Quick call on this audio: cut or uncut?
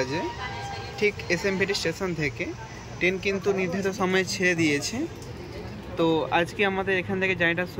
uncut